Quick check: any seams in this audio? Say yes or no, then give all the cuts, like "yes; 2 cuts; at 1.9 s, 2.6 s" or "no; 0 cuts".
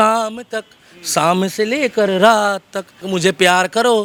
no; 0 cuts